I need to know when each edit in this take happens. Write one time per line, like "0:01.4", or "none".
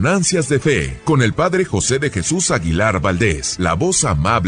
0:00.9
0:03.5